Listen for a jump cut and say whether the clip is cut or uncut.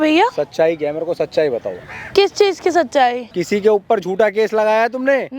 cut